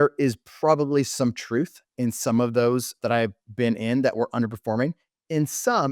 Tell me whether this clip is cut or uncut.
cut